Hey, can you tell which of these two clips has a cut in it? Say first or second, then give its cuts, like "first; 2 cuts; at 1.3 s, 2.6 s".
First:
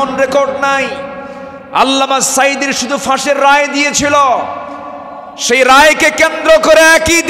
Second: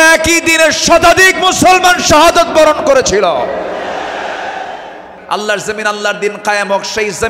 second; 1 cut; at 5.1 s